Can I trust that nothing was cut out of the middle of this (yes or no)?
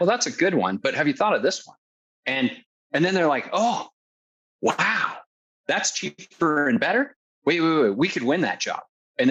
yes